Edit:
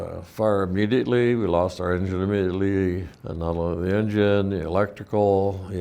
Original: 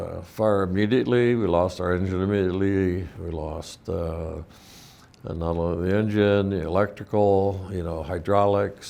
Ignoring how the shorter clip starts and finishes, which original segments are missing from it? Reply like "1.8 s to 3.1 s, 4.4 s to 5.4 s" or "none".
3.1 s to 5.1 s